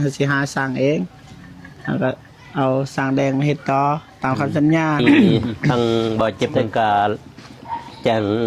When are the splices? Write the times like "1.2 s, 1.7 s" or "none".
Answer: 5.0 s